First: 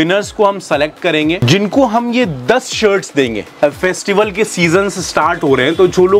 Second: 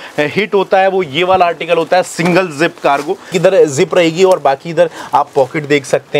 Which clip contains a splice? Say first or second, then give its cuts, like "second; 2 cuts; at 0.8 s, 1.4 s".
first; 2 cuts; at 1.4 s, 3.5 s